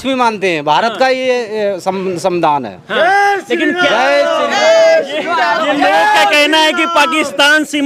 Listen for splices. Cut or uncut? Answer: uncut